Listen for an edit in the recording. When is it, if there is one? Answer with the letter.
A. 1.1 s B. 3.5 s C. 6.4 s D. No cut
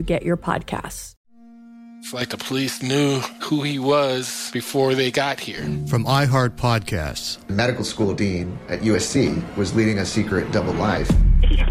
A